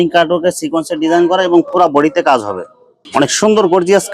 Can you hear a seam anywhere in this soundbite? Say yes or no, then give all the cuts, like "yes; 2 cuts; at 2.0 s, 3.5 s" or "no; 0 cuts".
yes; 1 cut; at 2.8 s